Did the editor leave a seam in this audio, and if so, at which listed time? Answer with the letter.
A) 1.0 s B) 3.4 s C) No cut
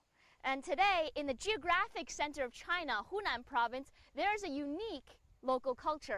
B